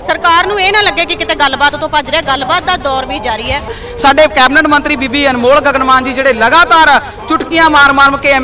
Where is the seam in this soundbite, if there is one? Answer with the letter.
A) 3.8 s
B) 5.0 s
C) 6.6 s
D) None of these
A